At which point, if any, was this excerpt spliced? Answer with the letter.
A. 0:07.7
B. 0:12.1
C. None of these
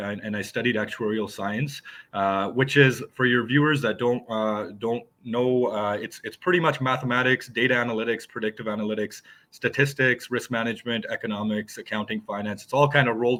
C